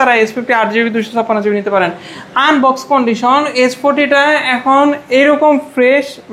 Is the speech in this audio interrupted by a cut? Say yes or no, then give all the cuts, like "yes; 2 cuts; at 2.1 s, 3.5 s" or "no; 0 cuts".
no; 0 cuts